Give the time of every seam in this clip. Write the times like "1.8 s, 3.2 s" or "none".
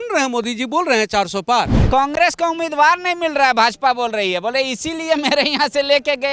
1.8 s